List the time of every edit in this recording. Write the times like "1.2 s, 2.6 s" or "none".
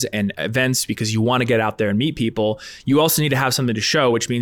none